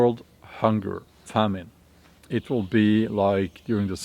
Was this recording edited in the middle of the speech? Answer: yes; 2 cuts; at 1.2 s, 2.1 s

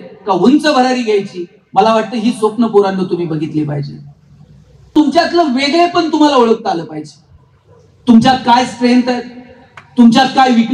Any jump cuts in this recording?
yes; 1 cut; at 4.9 s

